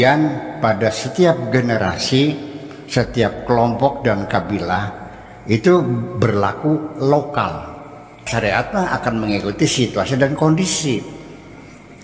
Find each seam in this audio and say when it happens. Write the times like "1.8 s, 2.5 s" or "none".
8.3 s

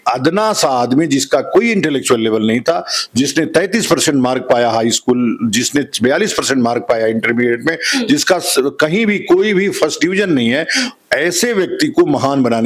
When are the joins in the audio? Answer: none

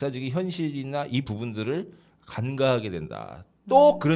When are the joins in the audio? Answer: none

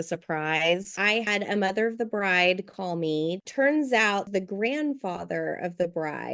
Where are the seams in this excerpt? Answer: 1.1 s, 3.4 s, 4.3 s

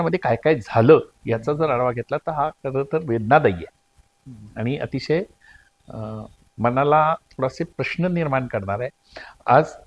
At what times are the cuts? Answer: none

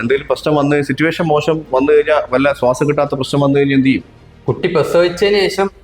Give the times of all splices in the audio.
none

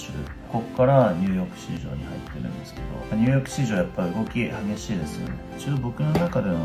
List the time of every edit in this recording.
5.4 s

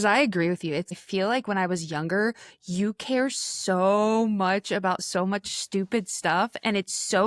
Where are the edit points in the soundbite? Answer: 0.9 s

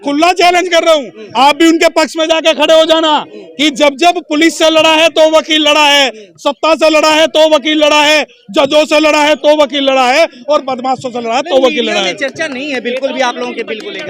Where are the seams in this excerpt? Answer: none

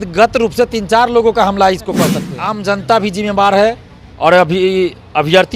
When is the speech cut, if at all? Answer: 2.3 s

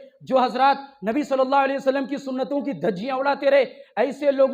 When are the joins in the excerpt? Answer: none

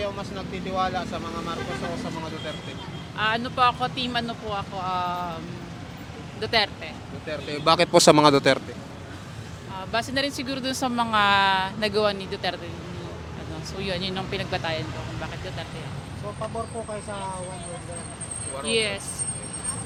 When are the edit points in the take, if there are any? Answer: none

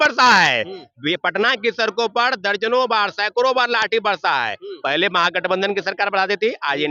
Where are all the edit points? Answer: none

